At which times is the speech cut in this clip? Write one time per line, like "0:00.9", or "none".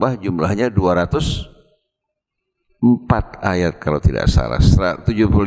none

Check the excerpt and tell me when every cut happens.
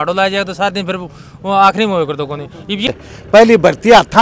0:02.9

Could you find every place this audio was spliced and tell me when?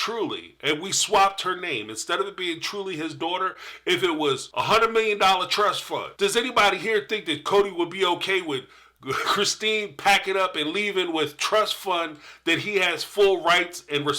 0:04.5
0:06.1

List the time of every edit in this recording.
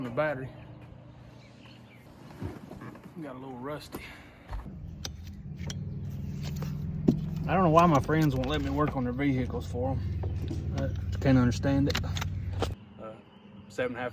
0:02.1
0:04.7
0:12.8

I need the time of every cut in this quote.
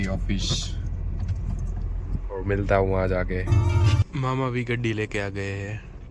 0:04.0

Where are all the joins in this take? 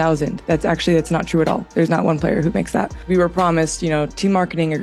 none

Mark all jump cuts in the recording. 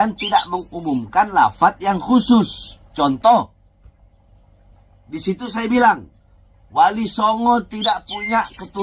none

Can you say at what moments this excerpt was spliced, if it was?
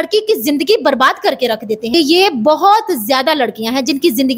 0:01.8

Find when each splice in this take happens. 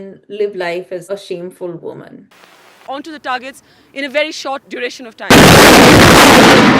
0:01.0
0:02.7

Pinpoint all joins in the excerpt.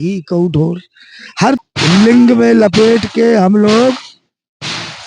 0:01.6

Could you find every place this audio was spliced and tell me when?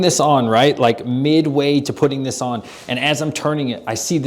none

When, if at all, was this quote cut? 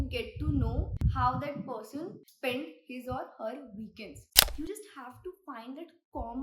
0:00.9
0:02.2
0:04.2

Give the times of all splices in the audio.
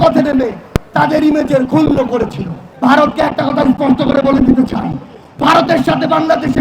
0:02.6

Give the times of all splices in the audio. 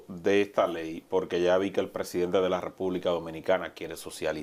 none

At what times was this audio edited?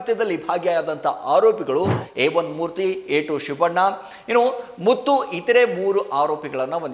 none

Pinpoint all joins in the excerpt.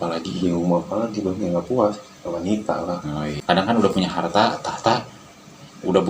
0:03.4

